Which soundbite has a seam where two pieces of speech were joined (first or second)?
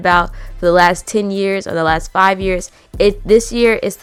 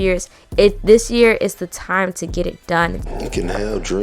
second